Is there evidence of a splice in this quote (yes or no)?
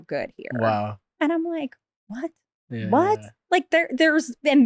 yes